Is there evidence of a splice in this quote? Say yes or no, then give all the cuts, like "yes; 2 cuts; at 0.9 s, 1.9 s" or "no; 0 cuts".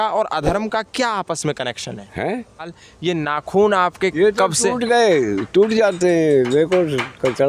yes; 1 cut; at 2.7 s